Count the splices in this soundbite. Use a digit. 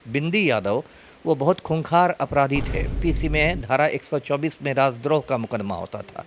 1